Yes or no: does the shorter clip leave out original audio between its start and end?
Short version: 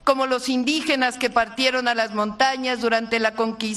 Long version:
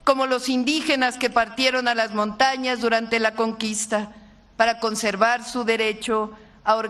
no